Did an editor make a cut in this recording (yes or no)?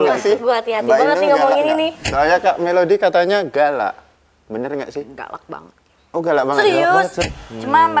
yes